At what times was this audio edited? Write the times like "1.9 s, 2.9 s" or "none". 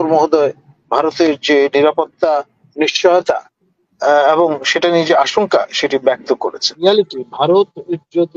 6.9 s